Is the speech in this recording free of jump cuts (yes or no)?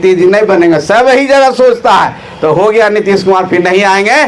yes